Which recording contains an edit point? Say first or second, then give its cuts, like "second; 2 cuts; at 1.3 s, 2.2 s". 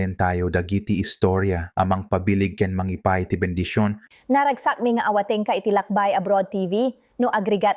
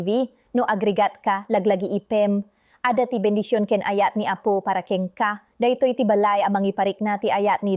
first; 1 cut; at 4.1 s